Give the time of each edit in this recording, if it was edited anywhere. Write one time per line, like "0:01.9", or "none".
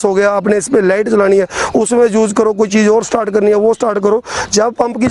none